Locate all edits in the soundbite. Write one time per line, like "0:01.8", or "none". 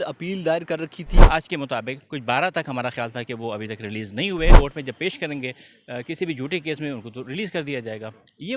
0:01.2
0:04.6